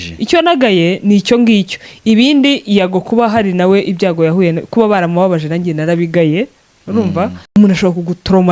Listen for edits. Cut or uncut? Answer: uncut